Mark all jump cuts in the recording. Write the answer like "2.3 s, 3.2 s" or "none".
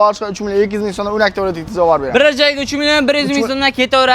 none